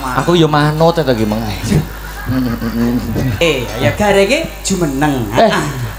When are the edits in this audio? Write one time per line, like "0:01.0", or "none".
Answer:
0:03.4